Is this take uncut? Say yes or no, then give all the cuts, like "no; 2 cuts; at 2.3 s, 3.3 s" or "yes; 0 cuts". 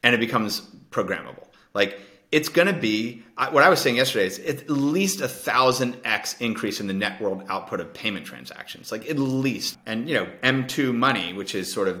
no; 1 cut; at 9.7 s